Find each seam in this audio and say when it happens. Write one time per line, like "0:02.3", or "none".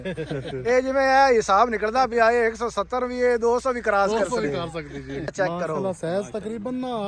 0:05.3

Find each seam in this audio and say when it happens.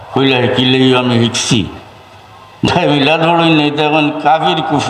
0:02.7

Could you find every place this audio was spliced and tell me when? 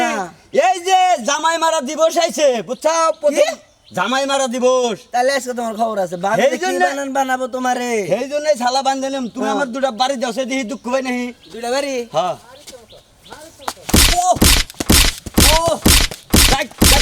none

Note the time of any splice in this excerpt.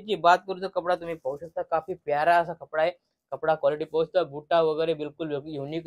none

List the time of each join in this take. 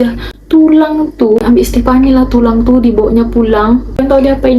0:01.4

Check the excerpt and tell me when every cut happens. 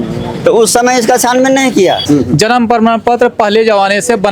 0:02.0

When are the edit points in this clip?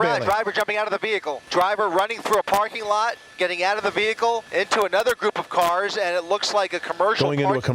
0:01.4
0:04.4

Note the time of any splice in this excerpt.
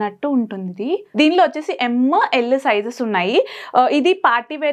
0:01.1

